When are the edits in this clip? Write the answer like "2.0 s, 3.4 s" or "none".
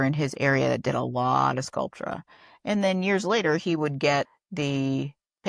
4.4 s